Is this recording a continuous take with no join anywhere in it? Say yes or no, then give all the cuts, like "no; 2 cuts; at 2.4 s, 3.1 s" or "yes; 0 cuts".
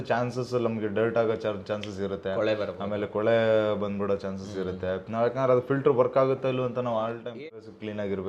no; 1 cut; at 7.4 s